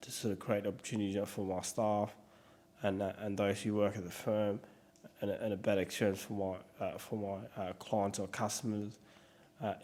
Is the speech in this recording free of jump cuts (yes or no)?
yes